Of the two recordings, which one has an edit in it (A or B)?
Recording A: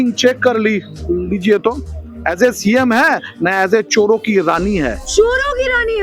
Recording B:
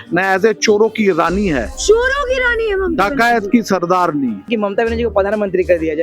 B